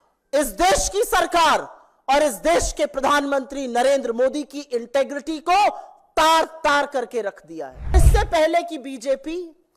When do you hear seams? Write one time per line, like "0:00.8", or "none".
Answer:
0:07.9